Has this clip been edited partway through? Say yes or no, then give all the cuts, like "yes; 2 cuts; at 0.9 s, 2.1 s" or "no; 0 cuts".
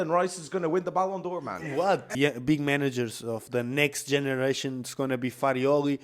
yes; 1 cut; at 2.0 s